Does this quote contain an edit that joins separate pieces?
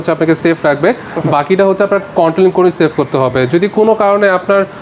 no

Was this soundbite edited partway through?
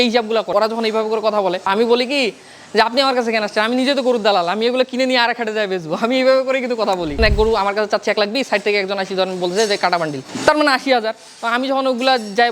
yes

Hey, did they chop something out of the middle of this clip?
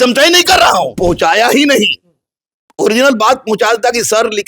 yes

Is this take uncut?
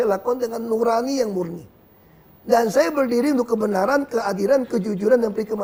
yes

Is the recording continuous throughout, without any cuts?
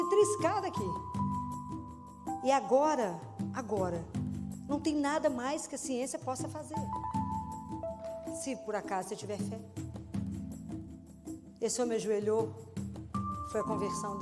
yes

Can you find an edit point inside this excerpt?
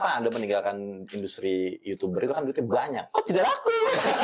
no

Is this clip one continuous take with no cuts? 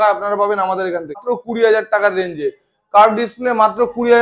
no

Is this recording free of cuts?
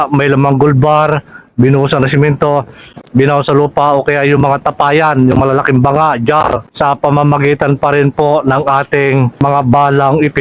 no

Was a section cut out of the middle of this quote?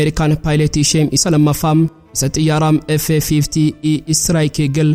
no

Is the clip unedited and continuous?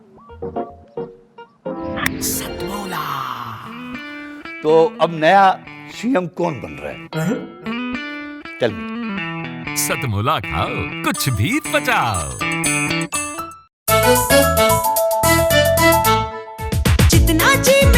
no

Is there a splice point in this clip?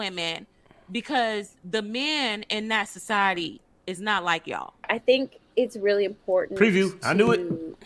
yes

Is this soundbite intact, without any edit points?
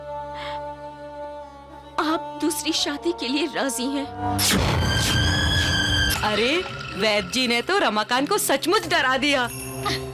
no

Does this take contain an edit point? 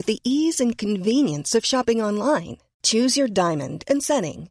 no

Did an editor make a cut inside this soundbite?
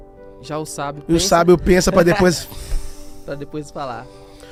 no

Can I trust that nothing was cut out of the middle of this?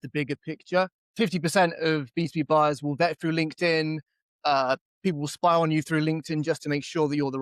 no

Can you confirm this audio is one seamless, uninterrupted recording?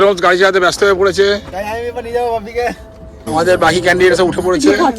no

